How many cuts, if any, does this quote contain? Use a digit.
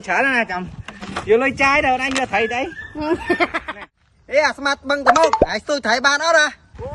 1